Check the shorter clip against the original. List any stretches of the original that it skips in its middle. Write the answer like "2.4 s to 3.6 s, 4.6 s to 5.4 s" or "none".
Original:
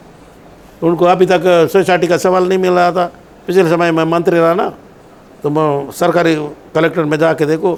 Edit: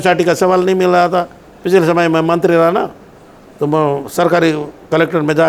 none